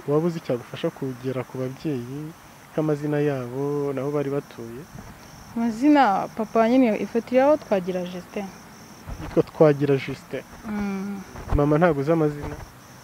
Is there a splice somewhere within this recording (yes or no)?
no